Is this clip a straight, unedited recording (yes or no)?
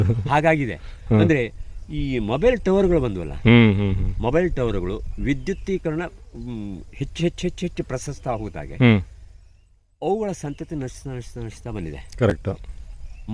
yes